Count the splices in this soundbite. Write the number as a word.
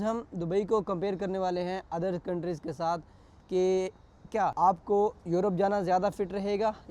one